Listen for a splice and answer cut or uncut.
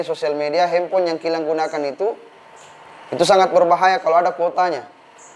uncut